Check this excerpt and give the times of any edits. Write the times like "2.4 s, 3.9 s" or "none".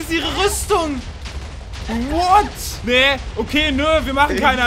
2.7 s